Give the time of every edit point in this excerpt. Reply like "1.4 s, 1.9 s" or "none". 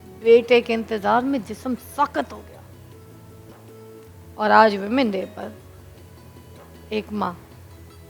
none